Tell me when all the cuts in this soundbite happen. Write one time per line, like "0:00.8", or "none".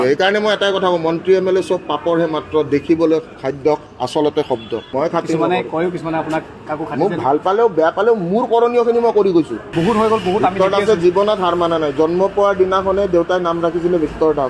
0:04.8
0:09.7